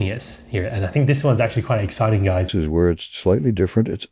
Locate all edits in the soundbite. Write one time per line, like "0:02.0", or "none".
0:02.5